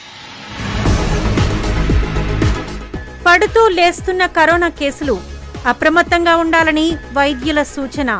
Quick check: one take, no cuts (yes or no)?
yes